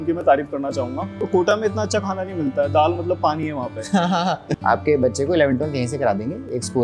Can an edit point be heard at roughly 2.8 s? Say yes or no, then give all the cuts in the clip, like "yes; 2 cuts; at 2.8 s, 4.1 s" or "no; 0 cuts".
no; 2 cuts; at 1.2 s, 4.5 s